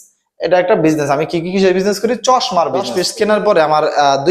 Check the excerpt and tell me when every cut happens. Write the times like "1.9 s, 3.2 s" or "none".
2.9 s